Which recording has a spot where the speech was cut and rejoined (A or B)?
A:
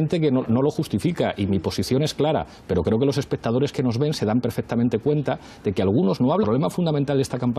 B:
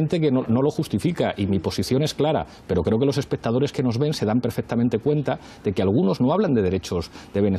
B